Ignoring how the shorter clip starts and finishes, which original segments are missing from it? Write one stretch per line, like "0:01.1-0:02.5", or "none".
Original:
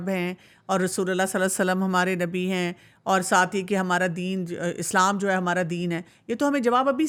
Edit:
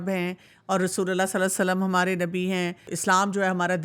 0:02.9-0:04.8

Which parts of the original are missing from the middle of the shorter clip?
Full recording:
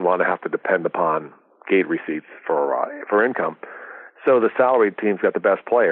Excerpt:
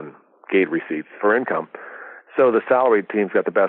0:02.3-0:03.0

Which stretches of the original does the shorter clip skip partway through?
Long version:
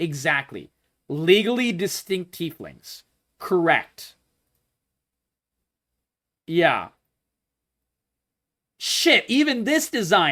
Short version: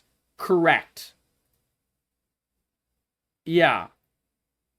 none

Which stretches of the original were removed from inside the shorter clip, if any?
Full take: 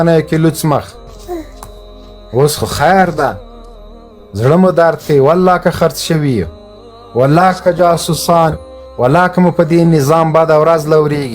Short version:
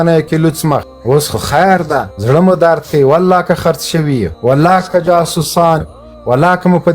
0:00.9-0:02.2
0:03.4-0:04.3
0:06.5-0:07.0

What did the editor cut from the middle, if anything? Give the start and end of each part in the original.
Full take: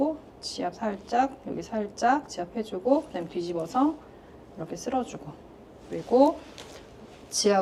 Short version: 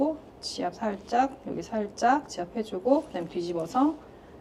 none

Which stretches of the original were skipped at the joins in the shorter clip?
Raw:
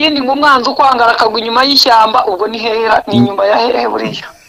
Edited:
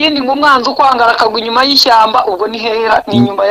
none

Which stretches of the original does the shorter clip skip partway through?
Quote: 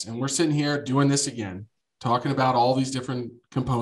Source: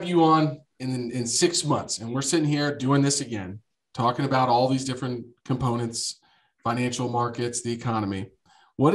none

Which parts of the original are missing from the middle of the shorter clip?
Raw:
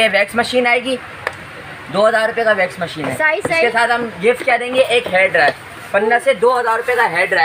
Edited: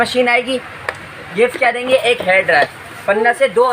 0:01.6-0:04.1

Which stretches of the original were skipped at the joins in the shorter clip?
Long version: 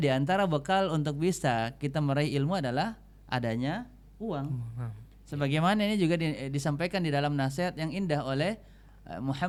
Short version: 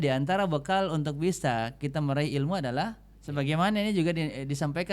0:03.1-0:05.1

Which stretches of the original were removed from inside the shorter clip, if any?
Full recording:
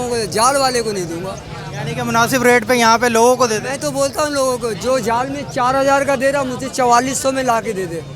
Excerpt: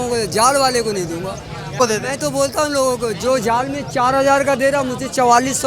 0:01.8-0:03.4

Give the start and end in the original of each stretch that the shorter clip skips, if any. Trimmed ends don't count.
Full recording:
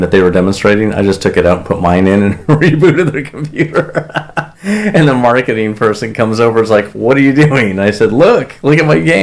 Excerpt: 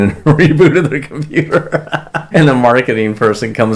0:04.5-0:04.9

